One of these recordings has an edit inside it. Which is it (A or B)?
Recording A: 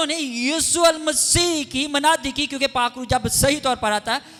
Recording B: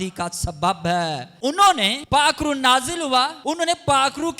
B